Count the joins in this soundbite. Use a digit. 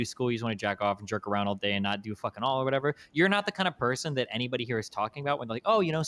0